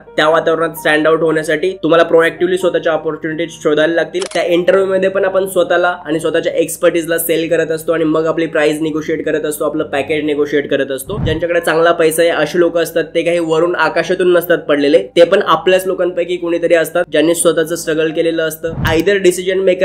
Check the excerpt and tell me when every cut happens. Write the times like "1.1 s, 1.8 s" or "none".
4.2 s, 11.2 s, 17.1 s, 18.8 s